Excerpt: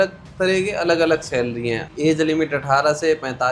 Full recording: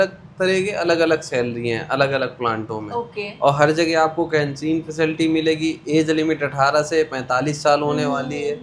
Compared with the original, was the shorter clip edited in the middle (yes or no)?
yes